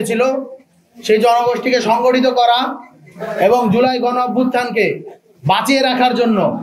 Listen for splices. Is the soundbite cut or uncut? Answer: uncut